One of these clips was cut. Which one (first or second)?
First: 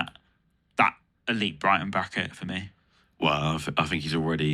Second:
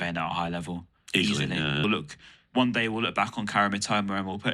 second